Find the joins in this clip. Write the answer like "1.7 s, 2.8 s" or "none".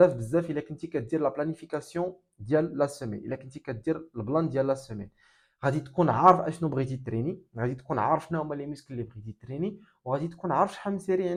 none

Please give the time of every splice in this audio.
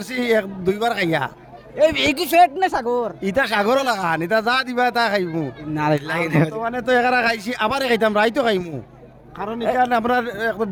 none

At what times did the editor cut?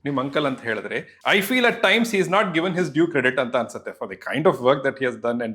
1.1 s

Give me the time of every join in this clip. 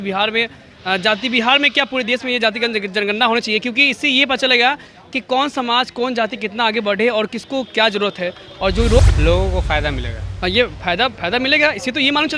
9.0 s

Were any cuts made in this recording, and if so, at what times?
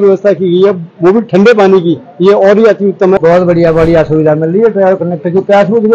3.2 s

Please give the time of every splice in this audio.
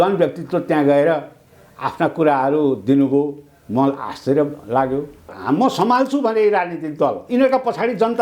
5.3 s

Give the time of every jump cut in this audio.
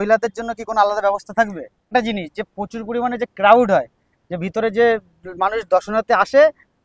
1.9 s

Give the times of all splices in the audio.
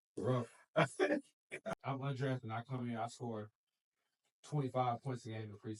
1.8 s

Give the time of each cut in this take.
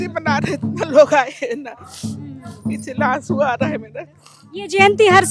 none

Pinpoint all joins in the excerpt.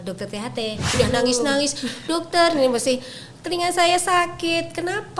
0.9 s

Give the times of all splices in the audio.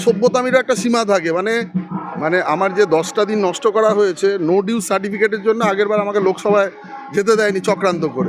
2.0 s

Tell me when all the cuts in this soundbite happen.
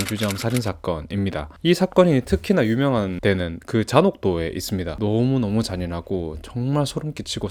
none

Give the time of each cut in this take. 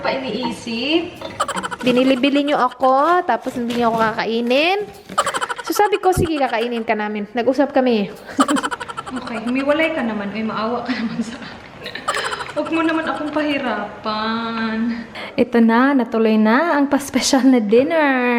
1.8 s, 8.7 s, 15.1 s

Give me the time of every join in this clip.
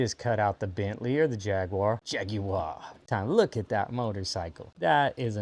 3.0 s

